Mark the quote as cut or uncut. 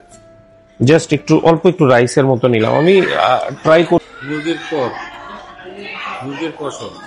cut